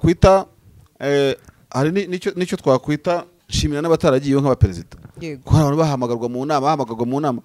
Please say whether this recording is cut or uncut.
cut